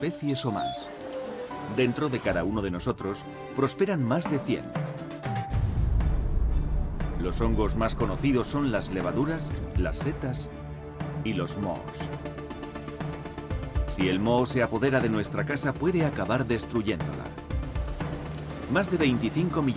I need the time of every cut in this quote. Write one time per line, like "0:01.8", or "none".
0:04.9